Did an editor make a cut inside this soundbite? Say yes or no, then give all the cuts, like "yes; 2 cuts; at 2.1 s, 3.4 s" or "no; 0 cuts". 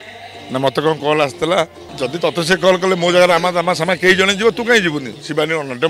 yes; 1 cut; at 1.8 s